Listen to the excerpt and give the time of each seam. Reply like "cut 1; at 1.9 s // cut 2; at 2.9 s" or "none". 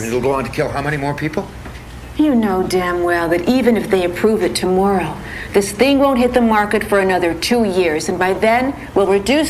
none